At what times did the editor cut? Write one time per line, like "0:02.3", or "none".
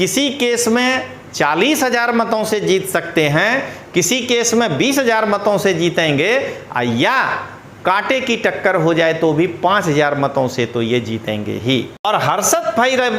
0:12.0